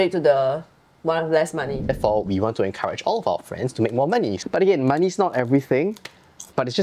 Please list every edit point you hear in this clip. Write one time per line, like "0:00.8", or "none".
0:01.8